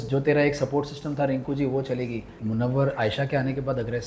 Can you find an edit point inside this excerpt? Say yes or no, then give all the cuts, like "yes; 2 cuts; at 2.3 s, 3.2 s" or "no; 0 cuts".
yes; 1 cut; at 2.4 s